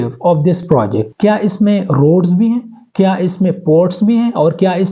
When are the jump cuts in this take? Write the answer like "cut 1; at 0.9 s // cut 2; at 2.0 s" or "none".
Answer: cut 1; at 1.1 s